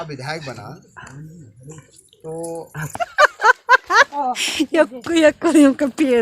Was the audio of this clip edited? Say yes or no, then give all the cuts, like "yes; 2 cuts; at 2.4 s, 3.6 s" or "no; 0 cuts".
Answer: yes; 1 cut; at 2.9 s